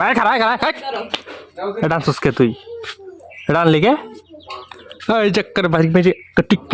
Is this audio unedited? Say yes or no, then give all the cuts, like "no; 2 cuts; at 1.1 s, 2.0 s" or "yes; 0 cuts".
yes; 0 cuts